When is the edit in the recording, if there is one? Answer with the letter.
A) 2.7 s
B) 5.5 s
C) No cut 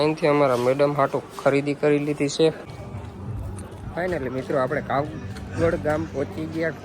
A